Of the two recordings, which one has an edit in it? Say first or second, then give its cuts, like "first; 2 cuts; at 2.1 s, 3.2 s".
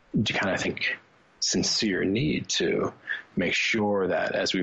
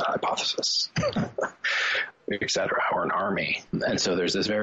second; 2 cuts; at 1.9 s, 3.8 s